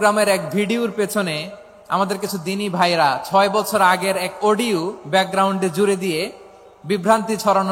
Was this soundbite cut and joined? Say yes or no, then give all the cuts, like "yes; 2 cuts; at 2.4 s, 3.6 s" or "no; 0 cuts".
no; 0 cuts